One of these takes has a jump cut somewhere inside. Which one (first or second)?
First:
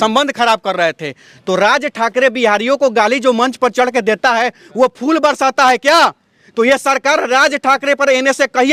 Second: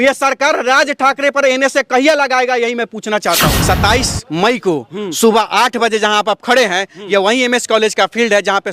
second